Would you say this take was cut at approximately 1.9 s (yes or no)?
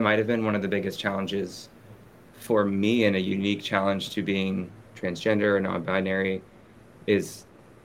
no